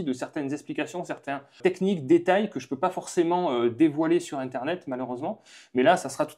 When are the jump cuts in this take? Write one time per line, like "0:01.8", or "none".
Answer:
0:01.6